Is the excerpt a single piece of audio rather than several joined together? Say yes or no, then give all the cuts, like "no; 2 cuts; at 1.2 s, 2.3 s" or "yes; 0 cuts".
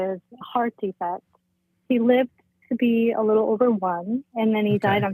no; 1 cut; at 1.8 s